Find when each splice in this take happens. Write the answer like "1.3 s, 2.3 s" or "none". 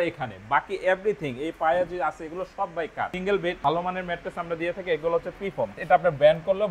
3.4 s, 5.8 s